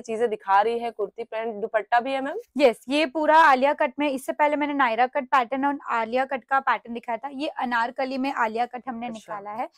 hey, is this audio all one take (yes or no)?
yes